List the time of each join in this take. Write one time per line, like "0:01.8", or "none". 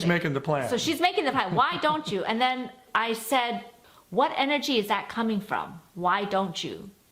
0:02.8
0:03.8